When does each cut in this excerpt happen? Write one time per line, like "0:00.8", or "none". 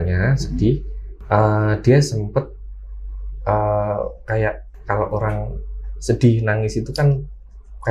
none